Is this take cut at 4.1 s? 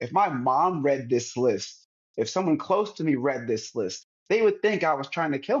no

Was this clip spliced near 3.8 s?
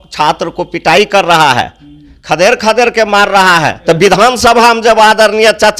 yes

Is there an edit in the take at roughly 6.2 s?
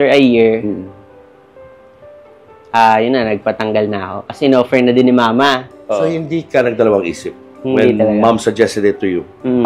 yes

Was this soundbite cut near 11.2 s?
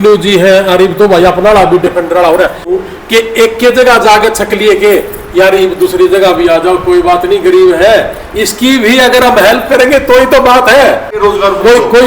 yes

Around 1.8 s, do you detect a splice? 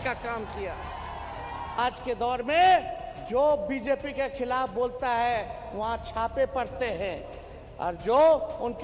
yes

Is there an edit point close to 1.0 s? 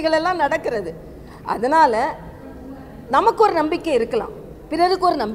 no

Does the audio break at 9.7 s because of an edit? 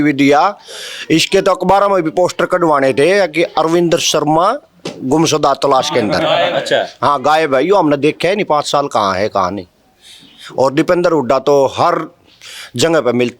no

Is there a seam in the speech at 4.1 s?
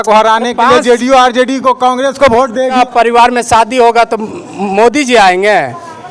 no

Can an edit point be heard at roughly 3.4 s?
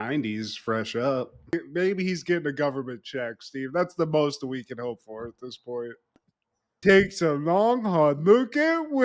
no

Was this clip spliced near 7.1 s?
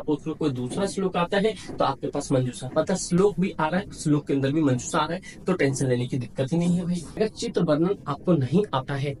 yes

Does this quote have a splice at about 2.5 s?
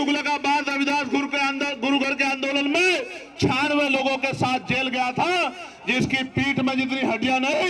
no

